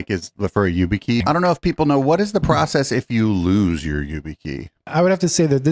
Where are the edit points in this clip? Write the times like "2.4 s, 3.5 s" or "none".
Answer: 1.2 s, 4.9 s